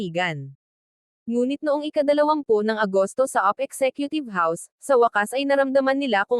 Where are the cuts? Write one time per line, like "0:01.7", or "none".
0:01.1